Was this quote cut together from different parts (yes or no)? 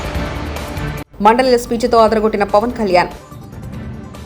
yes